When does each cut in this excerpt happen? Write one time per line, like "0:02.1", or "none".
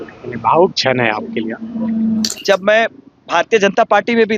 0:02.3